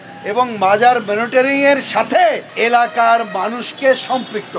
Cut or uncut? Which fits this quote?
cut